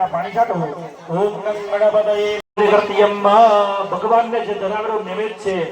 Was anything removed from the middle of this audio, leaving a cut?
yes; 1 cut; at 2.4 s

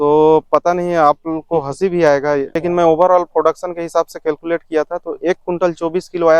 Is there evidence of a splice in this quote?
yes; 1 cut; at 2.6 s

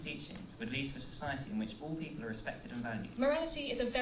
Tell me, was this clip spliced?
yes; 1 cut; at 3.1 s

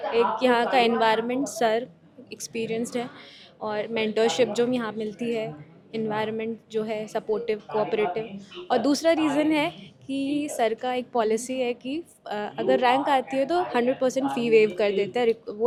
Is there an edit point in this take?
no; 0 cuts

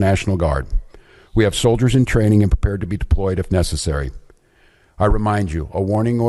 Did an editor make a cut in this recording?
no; 0 cuts

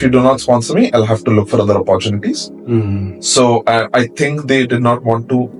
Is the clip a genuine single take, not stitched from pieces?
yes; 0 cuts

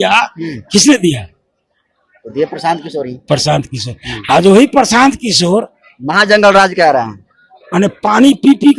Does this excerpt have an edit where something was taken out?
no; 0 cuts

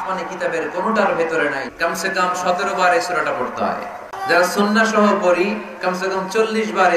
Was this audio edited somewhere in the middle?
yes; 2 cuts; at 1.6 s, 4.2 s

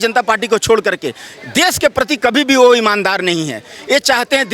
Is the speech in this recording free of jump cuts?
yes; 0 cuts

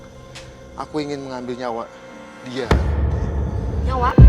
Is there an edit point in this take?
no; 0 cuts

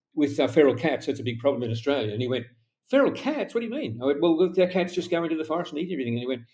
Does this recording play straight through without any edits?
yes; 0 cuts

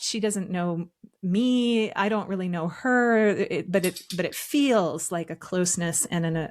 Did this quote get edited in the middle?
no; 0 cuts

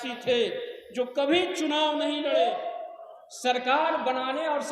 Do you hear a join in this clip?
yes; 1 cut; at 2.3 s

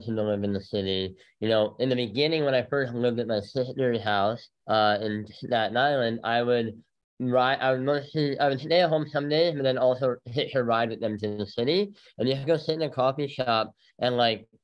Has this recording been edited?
yes; 1 cut; at 4.5 s

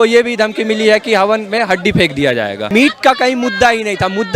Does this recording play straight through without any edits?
no; 1 cut; at 2.6 s

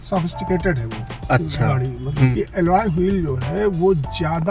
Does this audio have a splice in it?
yes; 1 cut; at 2.3 s

